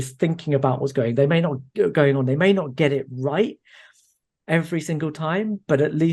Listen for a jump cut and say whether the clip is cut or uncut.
uncut